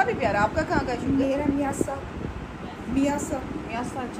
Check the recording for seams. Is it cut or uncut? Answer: uncut